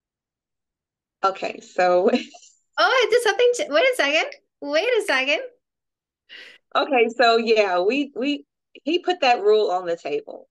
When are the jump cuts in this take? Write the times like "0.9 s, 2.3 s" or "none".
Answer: none